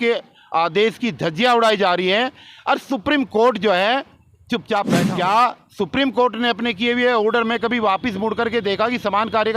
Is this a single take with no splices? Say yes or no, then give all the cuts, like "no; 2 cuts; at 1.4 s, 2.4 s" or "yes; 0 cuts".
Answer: no; 1 cut; at 5.0 s